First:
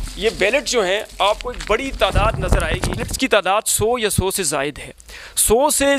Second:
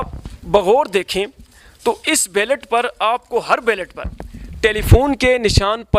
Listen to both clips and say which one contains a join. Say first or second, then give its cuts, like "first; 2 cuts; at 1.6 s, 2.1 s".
first; 1 cut; at 3.1 s